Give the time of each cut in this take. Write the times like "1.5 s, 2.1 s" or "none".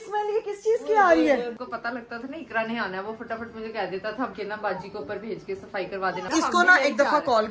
1.5 s, 4.3 s, 6.3 s